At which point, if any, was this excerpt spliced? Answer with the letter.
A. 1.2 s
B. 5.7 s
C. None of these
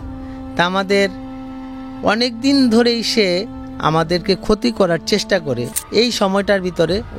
B